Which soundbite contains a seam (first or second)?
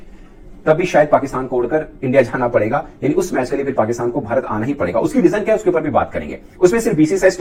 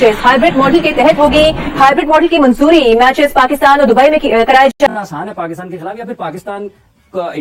second